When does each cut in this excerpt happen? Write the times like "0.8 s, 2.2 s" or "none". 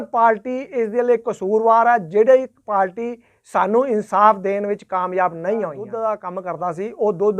5.8 s